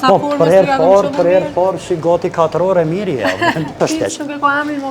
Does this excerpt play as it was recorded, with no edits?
no; 1 cut; at 3.8 s

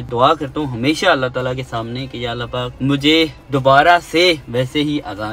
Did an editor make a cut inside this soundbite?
no; 0 cuts

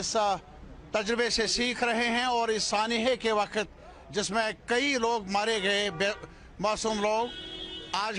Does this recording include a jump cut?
no; 0 cuts

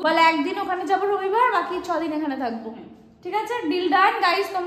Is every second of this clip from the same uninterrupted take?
yes; 0 cuts

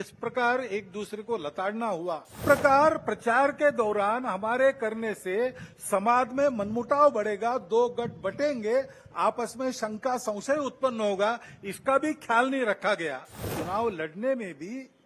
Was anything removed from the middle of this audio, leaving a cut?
yes; 2 cuts; at 2.4 s, 13.5 s

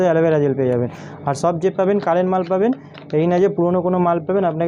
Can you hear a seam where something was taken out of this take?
no; 0 cuts

